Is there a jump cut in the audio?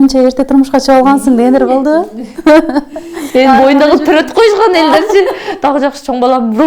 no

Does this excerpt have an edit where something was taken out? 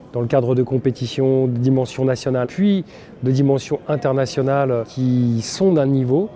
yes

